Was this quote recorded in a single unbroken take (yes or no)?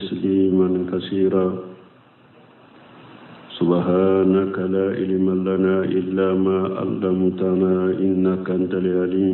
yes